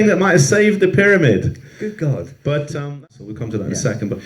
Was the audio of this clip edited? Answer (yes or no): yes